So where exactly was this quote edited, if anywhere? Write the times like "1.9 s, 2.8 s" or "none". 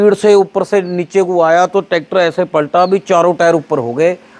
none